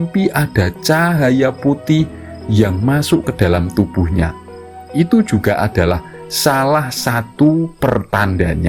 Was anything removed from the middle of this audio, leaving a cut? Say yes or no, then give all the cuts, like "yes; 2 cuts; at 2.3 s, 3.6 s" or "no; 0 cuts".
no; 0 cuts